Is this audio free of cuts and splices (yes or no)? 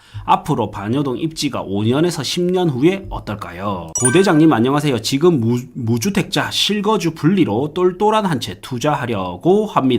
no